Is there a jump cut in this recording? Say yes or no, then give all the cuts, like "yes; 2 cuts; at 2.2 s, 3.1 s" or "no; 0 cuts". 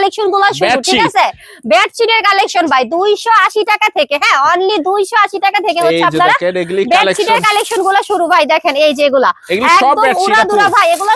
no; 0 cuts